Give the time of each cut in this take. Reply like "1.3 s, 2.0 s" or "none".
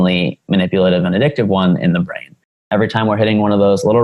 2.6 s